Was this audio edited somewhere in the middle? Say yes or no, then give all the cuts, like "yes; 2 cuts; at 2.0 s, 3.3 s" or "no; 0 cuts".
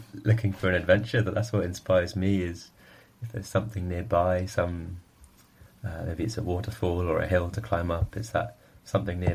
no; 0 cuts